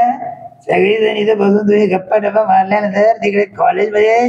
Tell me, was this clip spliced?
no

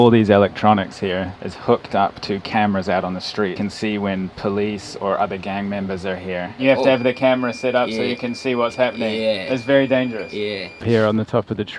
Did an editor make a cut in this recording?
yes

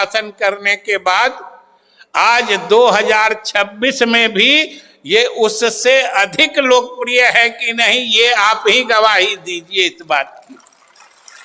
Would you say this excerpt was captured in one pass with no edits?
yes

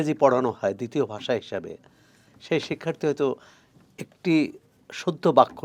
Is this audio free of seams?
yes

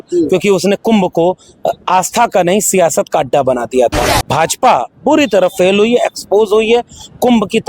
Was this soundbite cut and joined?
yes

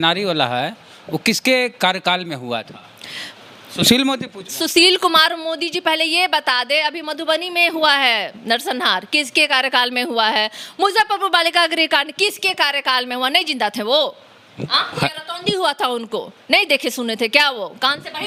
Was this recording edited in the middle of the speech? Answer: no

